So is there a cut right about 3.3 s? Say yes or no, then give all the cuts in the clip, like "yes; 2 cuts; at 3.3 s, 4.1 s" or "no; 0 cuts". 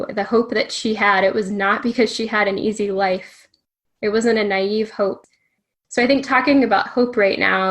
no; 1 cut; at 5.3 s